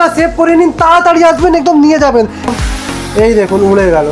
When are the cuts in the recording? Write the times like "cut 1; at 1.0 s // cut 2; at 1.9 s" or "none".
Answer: cut 1; at 2.5 s